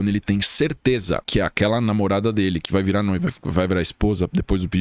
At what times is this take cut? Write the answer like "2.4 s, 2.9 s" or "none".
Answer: none